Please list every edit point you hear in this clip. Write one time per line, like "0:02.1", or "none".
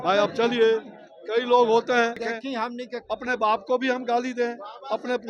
0:02.3